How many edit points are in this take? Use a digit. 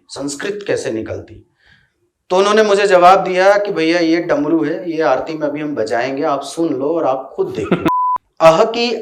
1